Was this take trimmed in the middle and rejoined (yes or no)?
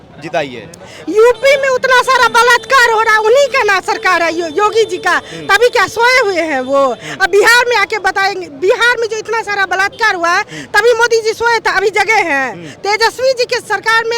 no